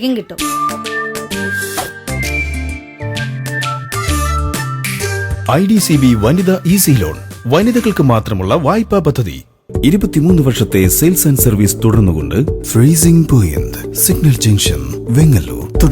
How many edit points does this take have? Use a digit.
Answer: 1